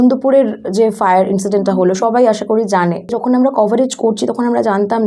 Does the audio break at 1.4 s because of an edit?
no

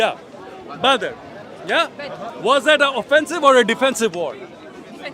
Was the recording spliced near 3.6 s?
no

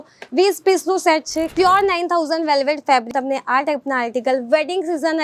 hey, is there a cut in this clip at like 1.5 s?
yes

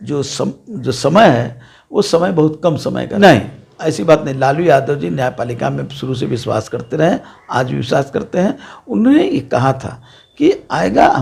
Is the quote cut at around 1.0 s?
no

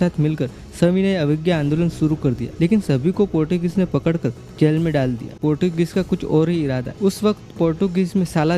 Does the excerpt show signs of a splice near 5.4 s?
yes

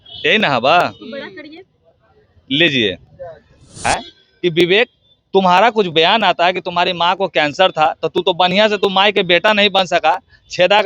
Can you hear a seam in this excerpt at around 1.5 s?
no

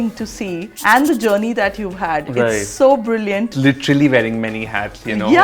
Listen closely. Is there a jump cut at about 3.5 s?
yes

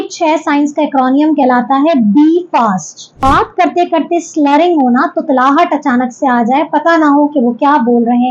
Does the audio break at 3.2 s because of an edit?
yes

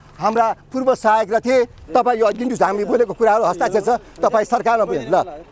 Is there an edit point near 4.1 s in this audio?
no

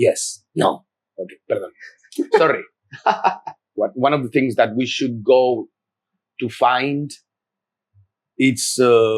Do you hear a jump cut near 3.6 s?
yes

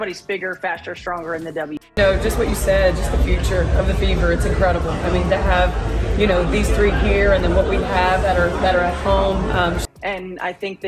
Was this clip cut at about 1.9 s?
yes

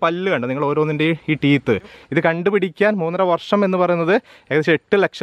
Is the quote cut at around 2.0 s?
yes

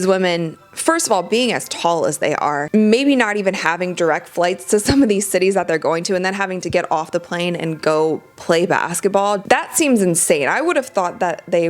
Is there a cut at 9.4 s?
yes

